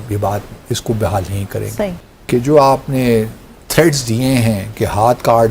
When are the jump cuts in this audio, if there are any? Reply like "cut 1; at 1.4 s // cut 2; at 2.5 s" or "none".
cut 1; at 2.1 s